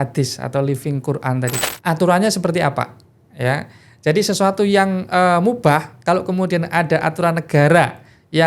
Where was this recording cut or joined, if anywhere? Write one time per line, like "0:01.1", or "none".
0:01.5